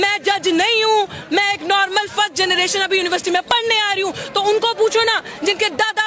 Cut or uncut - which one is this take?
uncut